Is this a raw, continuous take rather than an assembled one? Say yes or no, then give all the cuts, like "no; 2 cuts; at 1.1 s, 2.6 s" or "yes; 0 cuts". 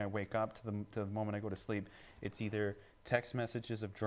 yes; 0 cuts